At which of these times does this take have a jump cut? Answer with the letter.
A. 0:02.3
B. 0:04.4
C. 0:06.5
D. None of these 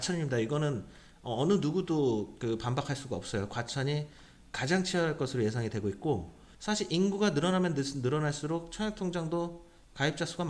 C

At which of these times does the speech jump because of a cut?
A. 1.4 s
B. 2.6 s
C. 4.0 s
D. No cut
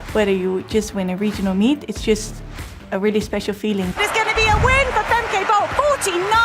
C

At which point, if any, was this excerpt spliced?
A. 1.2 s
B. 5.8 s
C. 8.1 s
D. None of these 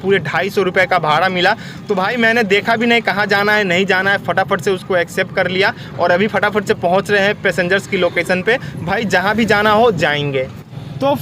D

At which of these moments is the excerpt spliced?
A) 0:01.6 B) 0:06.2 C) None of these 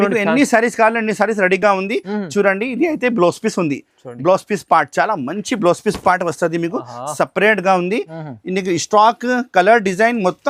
C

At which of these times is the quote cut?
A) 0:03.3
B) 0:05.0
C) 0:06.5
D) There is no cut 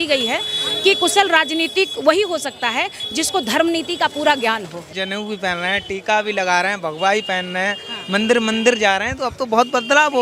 B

